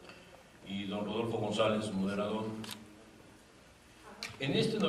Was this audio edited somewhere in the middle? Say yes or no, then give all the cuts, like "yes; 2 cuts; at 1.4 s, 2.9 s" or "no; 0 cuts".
yes; 1 cut; at 1.7 s